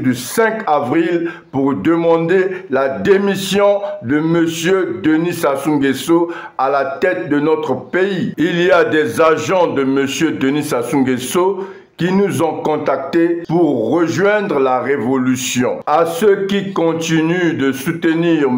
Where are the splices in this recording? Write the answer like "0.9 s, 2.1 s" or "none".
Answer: none